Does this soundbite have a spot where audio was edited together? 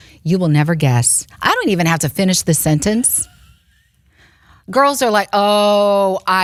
no; 0 cuts

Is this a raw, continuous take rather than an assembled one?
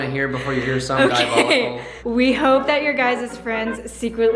no; 1 cut; at 1.9 s

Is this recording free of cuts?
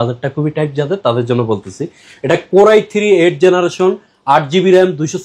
yes; 0 cuts

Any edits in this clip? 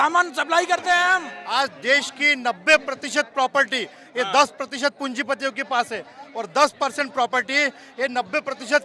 yes; 1 cut; at 1.4 s

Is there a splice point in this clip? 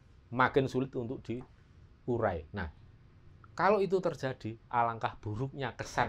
no; 0 cuts

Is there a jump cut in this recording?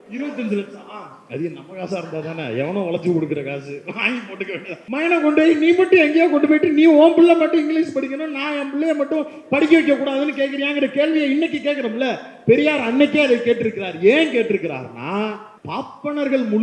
yes; 2 cuts; at 4.8 s, 15.5 s

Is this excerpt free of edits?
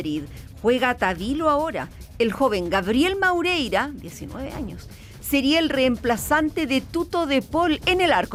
yes; 0 cuts

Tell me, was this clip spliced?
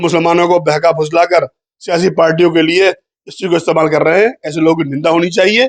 no; 0 cuts

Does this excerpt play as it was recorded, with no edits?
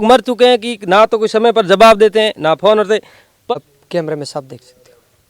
no; 1 cut; at 3.5 s

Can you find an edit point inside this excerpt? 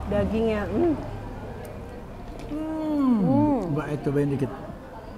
no; 0 cuts

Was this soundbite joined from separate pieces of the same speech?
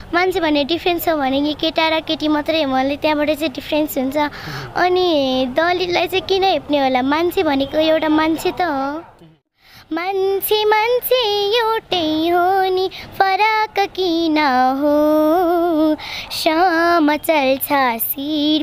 yes; 1 cut; at 9.6 s

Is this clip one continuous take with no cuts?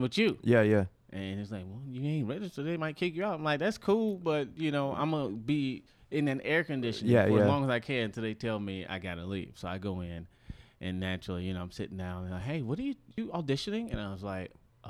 no; 1 cut; at 13.2 s

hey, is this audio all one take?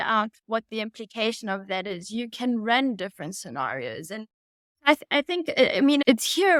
yes; 0 cuts

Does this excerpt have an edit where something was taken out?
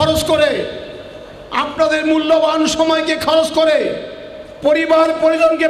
no; 0 cuts

